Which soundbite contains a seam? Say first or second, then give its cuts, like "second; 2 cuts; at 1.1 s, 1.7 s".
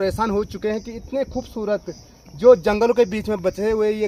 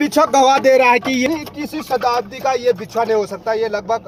second; 1 cut; at 1.3 s